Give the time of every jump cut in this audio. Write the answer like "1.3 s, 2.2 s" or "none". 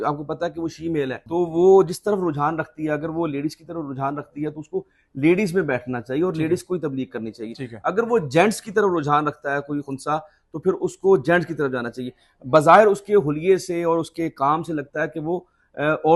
1.2 s, 9.9 s